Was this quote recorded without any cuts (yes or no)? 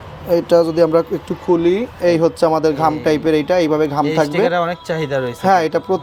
yes